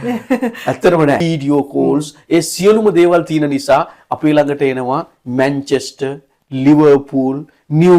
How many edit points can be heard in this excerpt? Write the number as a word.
one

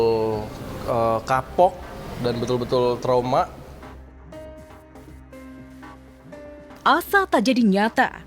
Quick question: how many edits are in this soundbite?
two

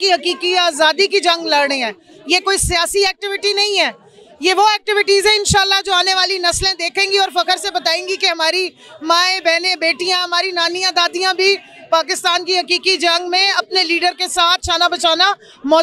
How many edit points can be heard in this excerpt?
zero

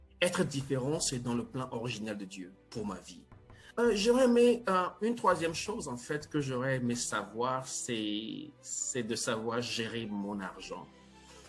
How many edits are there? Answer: one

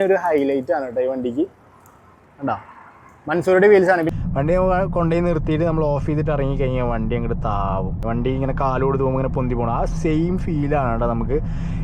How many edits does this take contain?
two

